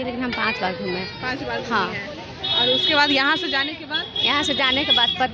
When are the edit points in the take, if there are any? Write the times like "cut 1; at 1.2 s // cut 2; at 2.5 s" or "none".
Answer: none

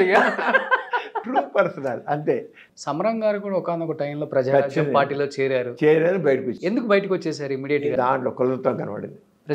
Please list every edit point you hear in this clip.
cut 1; at 2.6 s // cut 2; at 7.9 s

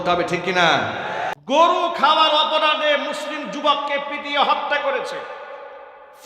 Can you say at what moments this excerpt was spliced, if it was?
cut 1; at 1.4 s

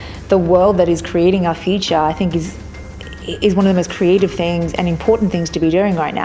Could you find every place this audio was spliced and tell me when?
none

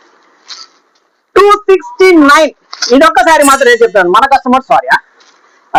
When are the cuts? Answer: none

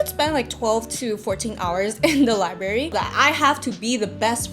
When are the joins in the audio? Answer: cut 1; at 2.9 s

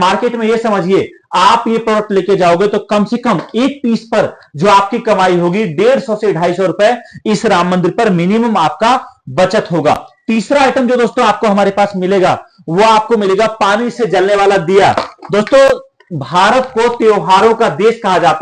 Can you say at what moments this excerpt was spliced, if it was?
none

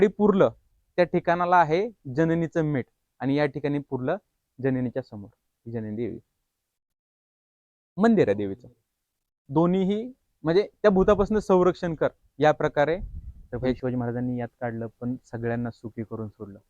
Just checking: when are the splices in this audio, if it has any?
cut 1; at 13.8 s

